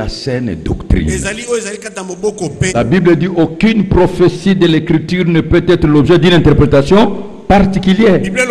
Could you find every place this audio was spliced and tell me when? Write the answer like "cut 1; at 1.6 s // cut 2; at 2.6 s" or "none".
cut 1; at 2.7 s